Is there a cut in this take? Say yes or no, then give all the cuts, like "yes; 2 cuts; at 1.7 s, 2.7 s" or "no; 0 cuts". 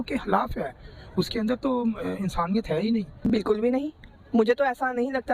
yes; 1 cut; at 3.2 s